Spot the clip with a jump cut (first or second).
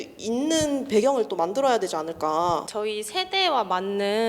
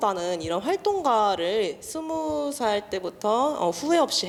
first